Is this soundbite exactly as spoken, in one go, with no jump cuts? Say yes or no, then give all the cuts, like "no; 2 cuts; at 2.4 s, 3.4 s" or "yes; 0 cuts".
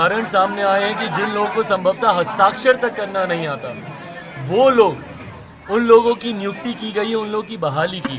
yes; 0 cuts